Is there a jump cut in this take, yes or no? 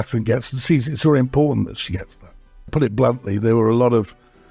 yes